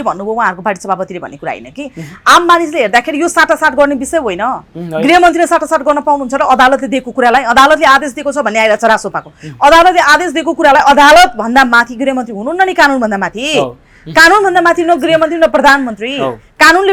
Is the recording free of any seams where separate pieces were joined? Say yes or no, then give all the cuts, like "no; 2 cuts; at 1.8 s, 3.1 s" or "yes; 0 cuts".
yes; 0 cuts